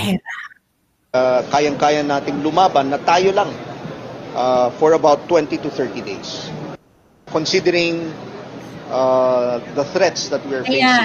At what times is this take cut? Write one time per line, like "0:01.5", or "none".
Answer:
0:01.1